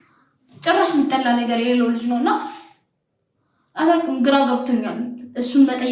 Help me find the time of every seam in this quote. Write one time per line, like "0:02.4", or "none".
none